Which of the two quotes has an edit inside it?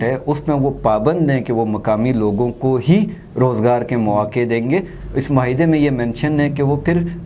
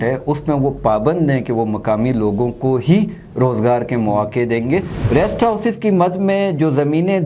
second; 1 cut; at 5.0 s

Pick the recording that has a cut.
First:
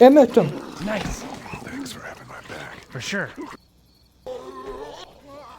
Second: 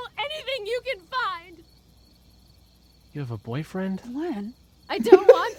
first; 1 cut; at 4.3 s

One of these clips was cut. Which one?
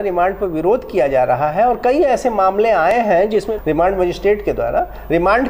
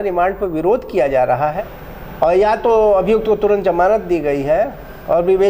second; 1 cut; at 1.5 s

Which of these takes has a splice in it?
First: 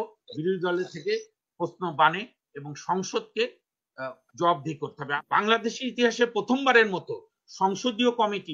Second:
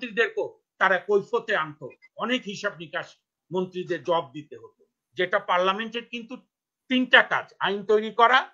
first; 1 cut; at 5.1 s

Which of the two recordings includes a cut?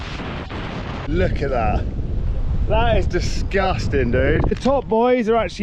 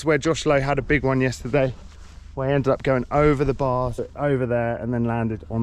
first; 2 cuts; at 1.0 s, 4.5 s

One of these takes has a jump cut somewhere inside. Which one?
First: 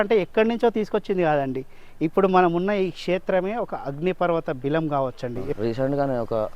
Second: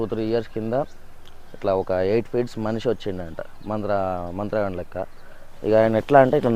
first; 1 cut; at 5.5 s

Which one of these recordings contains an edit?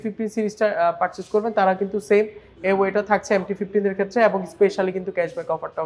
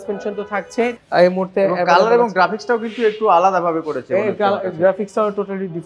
second; 1 cut; at 1.0 s

